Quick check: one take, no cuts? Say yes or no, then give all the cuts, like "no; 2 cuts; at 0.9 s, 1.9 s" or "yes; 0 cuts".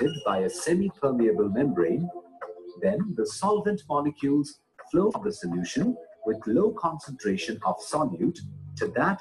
no; 1 cut; at 5.2 s